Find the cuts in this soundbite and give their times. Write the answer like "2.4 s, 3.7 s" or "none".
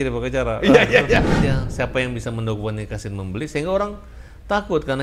1.3 s